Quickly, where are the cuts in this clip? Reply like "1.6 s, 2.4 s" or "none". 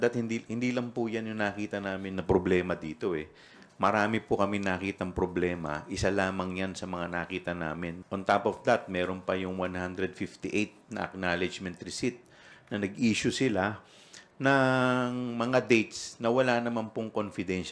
8.0 s